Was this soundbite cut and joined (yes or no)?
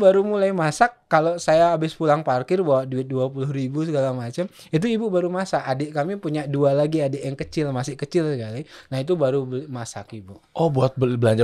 no